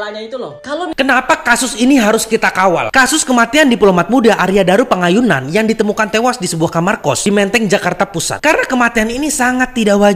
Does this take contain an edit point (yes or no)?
yes